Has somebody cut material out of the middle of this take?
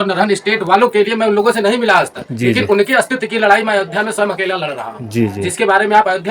no; 0 cuts

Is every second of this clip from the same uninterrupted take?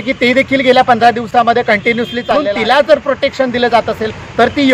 no; 1 cut; at 2.4 s

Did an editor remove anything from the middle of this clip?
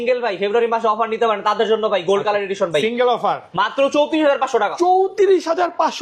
no; 0 cuts

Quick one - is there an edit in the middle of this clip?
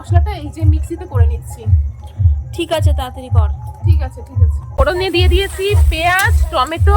yes; 1 cut; at 4.7 s

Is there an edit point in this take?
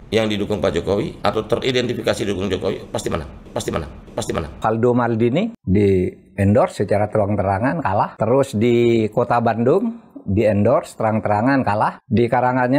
yes; 1 cut; at 4.6 s

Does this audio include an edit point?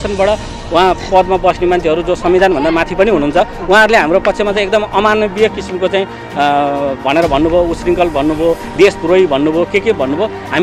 no; 0 cuts

